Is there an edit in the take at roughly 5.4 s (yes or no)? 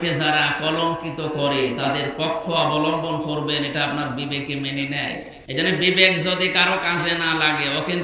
yes